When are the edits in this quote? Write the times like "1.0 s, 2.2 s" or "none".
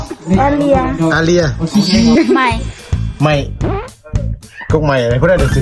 2.2 s

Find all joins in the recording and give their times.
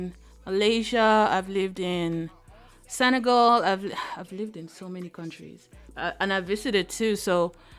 5.8 s

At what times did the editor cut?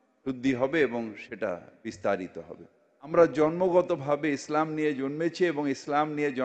3.1 s

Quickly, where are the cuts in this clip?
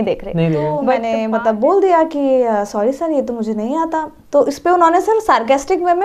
1.0 s

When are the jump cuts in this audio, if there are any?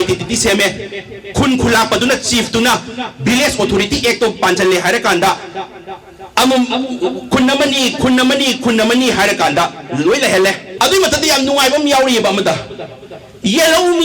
10.7 s

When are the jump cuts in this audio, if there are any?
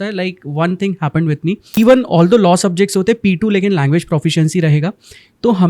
1.8 s

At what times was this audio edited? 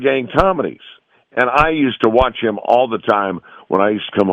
1.1 s

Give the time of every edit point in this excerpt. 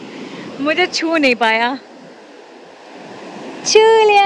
none

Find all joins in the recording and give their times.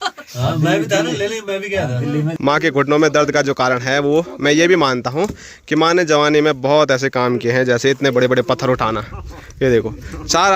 2.3 s

